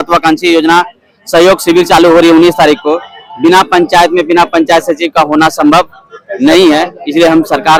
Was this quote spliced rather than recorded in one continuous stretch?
no; 0 cuts

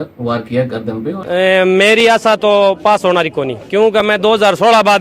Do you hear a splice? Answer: yes; 1 cut; at 1.2 s

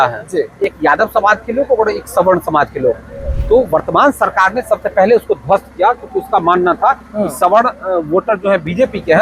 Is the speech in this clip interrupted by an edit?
no; 0 cuts

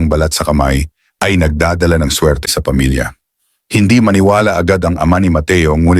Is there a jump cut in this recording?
yes; 1 cut; at 2.4 s

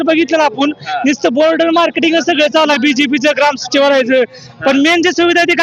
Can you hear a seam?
no; 0 cuts

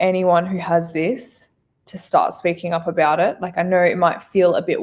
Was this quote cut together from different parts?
no; 0 cuts

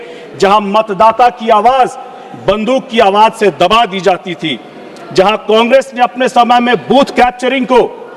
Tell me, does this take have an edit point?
no; 0 cuts

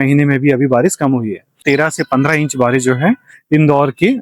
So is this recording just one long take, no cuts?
no; 1 cut; at 1.6 s

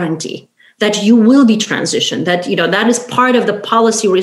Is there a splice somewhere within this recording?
no; 0 cuts

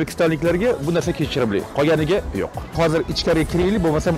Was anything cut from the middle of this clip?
yes; 1 cut; at 2.7 s

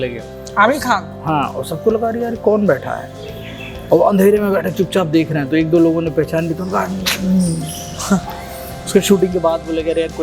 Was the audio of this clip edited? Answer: no; 0 cuts

